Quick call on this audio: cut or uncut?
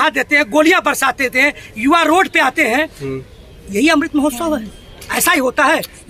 uncut